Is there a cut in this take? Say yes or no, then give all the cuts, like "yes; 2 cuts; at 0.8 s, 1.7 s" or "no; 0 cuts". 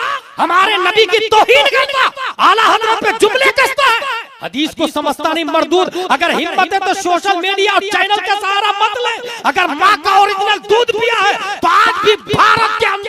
no; 0 cuts